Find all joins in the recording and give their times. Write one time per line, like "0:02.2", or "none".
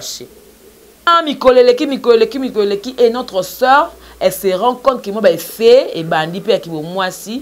0:01.1